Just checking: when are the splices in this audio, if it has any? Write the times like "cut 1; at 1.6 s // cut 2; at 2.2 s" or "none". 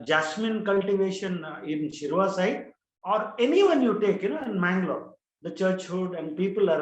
none